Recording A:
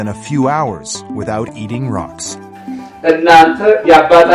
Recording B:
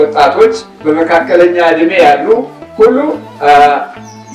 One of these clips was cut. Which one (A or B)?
A